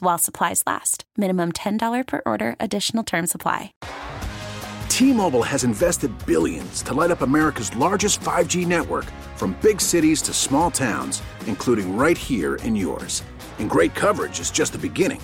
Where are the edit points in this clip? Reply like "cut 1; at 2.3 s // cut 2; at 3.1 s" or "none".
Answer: cut 1; at 3.8 s